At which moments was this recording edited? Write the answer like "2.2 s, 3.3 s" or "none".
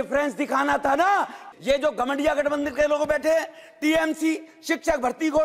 1.4 s